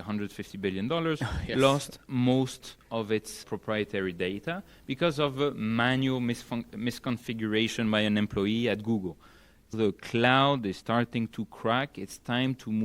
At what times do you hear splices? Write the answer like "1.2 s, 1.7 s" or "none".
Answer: 3.4 s, 9.7 s